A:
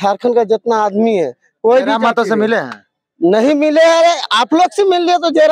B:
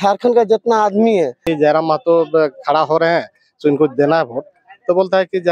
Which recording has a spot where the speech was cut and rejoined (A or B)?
B